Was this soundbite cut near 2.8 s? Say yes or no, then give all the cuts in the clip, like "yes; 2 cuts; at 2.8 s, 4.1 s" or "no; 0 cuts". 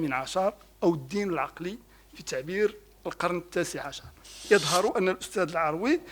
no; 1 cut; at 4.5 s